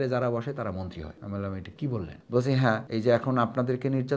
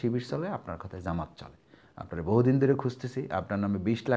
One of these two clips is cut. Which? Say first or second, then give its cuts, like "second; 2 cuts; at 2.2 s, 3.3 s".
first; 3 cuts; at 1.2 s, 2.2 s, 2.8 s